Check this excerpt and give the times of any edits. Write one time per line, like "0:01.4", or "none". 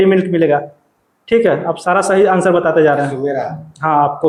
none